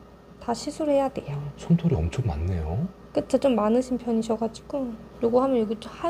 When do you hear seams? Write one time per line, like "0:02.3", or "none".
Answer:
0:05.0